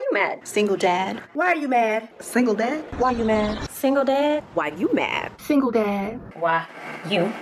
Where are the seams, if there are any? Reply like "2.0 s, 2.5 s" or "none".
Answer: none